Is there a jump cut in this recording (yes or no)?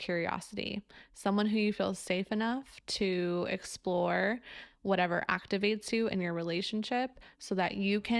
no